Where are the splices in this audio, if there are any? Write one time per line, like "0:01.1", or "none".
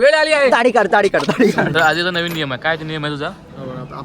0:01.7